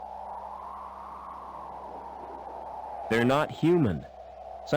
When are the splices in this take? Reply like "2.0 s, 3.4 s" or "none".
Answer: 0.9 s, 3.1 s